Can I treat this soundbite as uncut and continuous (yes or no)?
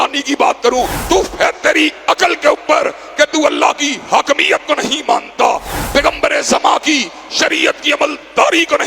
no